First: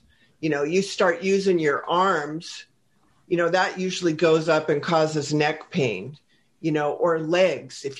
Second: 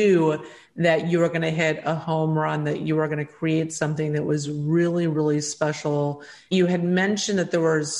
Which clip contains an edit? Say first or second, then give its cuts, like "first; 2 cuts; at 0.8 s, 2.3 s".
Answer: second; 1 cut; at 6.3 s